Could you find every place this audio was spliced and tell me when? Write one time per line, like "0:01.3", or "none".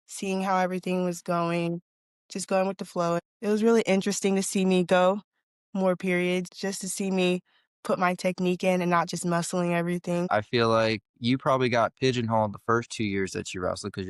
0:03.2
0:06.5
0:10.3